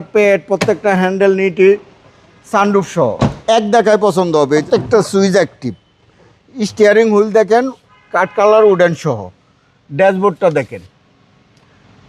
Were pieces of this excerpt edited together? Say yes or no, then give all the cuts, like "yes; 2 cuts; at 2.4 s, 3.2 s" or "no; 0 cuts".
yes; 2 cuts; at 3.4 s, 4.6 s